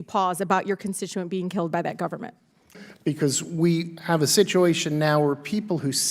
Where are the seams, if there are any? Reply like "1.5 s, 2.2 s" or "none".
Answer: 2.8 s